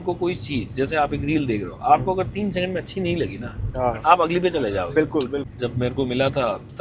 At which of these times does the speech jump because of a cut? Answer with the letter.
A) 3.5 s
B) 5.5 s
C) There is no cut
B